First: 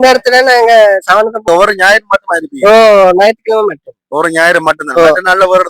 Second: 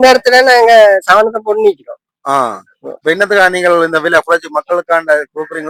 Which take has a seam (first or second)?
first